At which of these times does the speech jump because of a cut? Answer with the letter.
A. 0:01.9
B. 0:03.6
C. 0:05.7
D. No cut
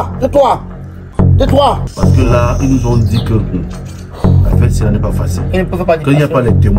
A